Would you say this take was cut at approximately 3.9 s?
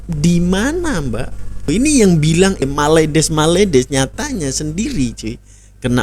no; 2 cuts; at 1.7 s, 2.6 s

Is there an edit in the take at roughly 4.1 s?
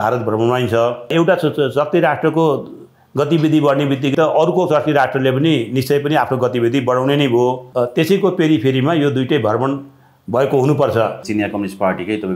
yes; 4 cuts; at 1.1 s, 4.1 s, 7.6 s, 11.2 s

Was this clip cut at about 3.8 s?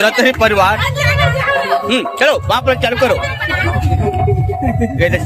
no; 0 cuts

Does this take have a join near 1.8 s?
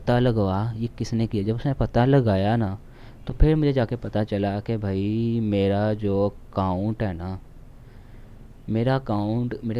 no; 0 cuts

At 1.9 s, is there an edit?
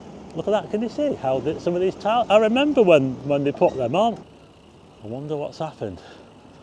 no; 1 cut; at 4.2 s

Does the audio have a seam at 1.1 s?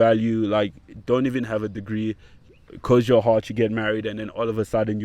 no; 0 cuts

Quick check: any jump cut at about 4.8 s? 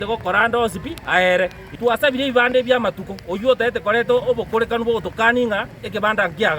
no; 1 cut; at 1.6 s

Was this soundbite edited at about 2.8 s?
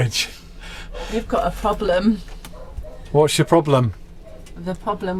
no; 0 cuts

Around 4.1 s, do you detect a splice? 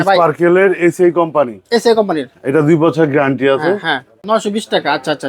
yes; 1 cut; at 4.1 s

